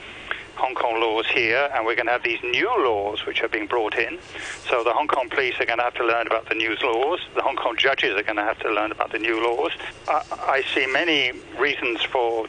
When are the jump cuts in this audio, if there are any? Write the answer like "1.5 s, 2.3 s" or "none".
10.0 s, 11.4 s